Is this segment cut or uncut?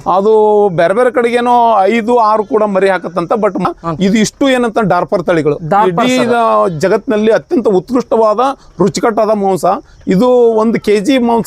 cut